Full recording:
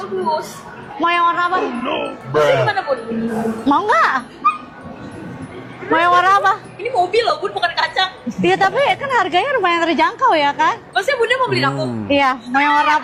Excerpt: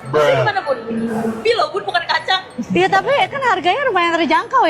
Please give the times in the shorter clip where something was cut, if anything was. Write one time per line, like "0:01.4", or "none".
0:01.4